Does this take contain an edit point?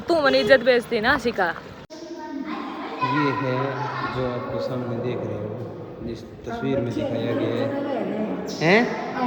yes; 1 cut; at 1.6 s

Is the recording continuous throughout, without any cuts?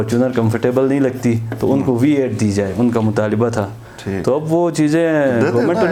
yes; 0 cuts

